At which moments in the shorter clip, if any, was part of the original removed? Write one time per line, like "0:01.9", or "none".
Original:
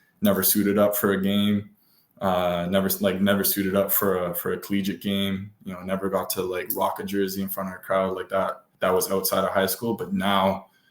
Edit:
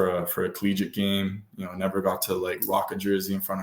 none